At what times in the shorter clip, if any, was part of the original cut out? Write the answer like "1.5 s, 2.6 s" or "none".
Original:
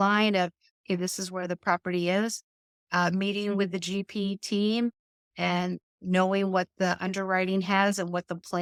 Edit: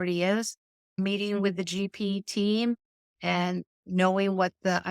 1.0 s